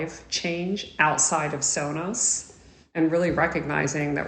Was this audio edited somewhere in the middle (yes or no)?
yes